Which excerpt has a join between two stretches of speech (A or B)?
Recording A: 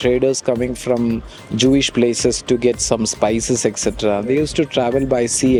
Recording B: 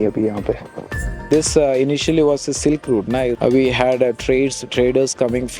B